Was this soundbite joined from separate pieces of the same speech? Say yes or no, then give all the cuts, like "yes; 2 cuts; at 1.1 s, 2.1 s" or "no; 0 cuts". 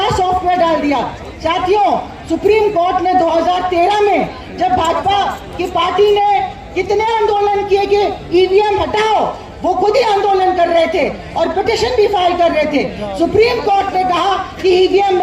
no; 0 cuts